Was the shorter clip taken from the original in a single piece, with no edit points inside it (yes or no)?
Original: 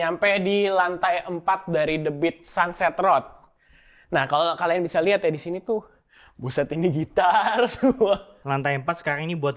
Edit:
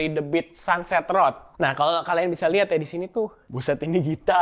no